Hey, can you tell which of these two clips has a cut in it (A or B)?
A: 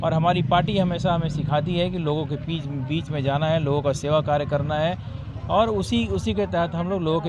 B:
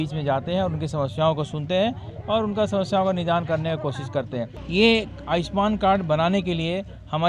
B